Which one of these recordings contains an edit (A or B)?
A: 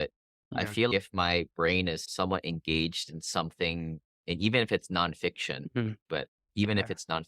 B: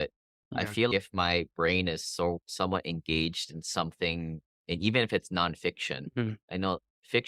A